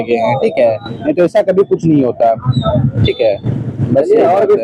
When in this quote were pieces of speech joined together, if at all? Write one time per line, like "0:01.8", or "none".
none